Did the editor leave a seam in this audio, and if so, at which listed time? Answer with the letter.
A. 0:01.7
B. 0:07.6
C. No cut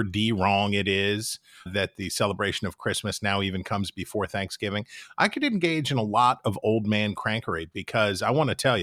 A